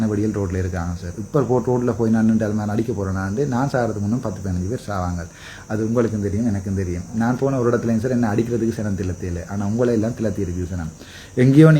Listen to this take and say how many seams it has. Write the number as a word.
zero